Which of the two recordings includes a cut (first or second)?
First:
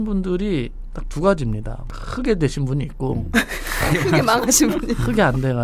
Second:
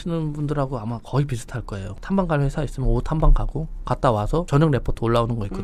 second